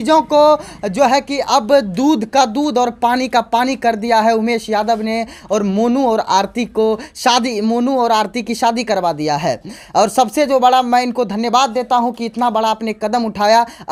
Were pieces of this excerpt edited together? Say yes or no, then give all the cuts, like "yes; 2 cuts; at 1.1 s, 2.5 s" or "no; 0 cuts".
no; 0 cuts